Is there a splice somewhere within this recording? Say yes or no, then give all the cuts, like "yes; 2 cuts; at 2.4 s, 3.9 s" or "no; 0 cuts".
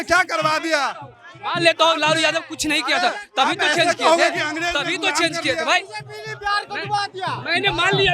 no; 0 cuts